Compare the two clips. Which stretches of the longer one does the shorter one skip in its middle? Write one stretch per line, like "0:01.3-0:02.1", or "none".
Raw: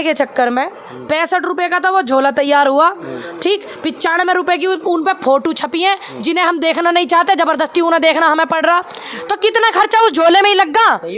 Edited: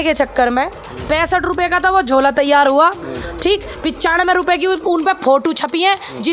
none